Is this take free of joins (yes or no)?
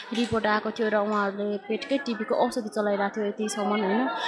yes